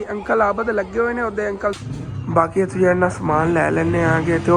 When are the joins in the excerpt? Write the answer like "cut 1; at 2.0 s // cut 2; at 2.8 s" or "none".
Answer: cut 1; at 1.8 s